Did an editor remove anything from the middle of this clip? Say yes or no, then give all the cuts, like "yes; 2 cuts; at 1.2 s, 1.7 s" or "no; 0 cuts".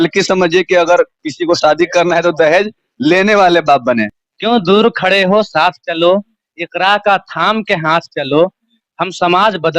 yes; 1 cut; at 4.2 s